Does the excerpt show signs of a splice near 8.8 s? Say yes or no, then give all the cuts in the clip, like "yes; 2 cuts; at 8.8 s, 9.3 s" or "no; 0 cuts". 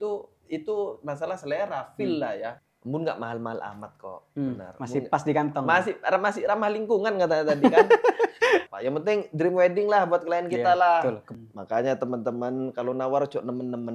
yes; 3 cuts; at 2.7 s, 8.8 s, 11.2 s